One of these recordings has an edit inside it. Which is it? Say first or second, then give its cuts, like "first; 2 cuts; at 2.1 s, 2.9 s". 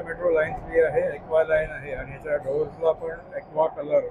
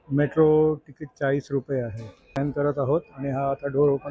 second; 1 cut; at 2.4 s